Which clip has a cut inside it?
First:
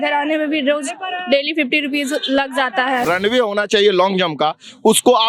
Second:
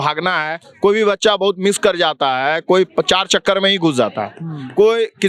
first; 1 cut; at 3.1 s

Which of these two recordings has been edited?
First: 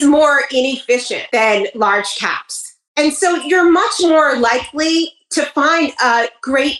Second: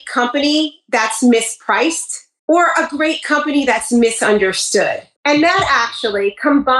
first; 1 cut; at 1.2 s

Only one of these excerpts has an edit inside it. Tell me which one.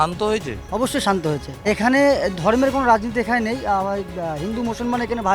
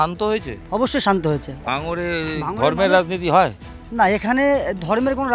first; 1 cut; at 1.7 s

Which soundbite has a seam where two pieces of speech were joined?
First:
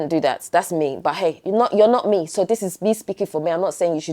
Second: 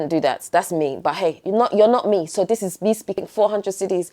second; 1 cut; at 3.1 s

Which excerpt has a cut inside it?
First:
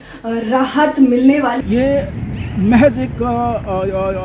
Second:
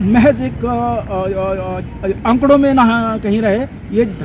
first; 1 cut; at 1.6 s

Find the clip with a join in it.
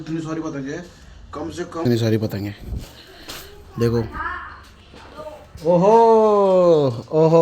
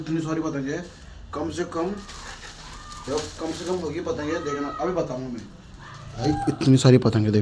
first; 1 cut; at 1.8 s

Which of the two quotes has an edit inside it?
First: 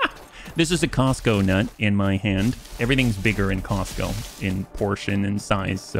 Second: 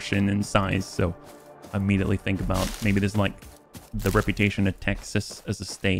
first; 1 cut; at 2.7 s

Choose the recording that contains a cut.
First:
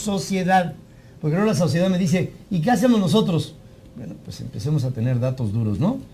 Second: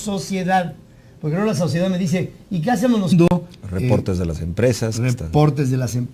first; 1 cut; at 3.1 s

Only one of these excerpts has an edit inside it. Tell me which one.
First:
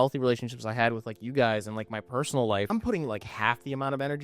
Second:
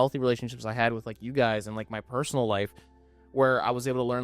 first; 1 cut; at 2.7 s

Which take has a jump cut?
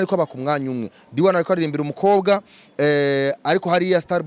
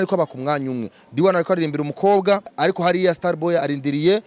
second; 1 cut; at 2.5 s

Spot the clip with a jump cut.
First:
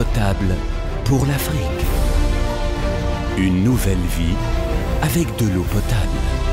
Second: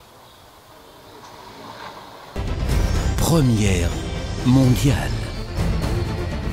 second; 1 cut; at 2.4 s

